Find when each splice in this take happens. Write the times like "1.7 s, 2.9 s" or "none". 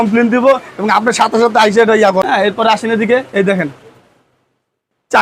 2.3 s